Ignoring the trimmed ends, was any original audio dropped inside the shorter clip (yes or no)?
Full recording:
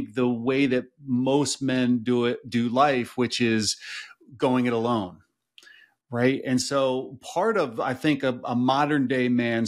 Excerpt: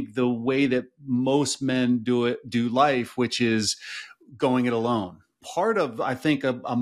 yes